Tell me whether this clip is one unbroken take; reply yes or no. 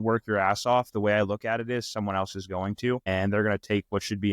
no